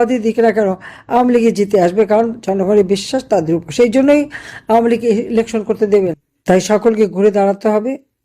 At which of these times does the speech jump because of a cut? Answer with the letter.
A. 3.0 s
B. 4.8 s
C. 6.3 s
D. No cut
C